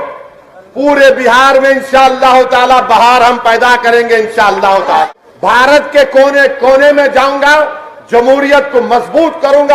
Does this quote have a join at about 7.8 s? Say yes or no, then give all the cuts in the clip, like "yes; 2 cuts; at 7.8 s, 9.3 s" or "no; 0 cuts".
no; 1 cut; at 5.1 s